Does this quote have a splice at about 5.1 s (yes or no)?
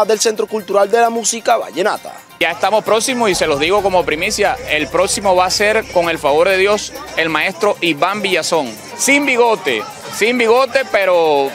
no